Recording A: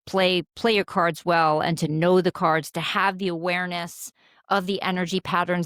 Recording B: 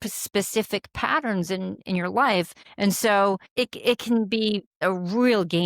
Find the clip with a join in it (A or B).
B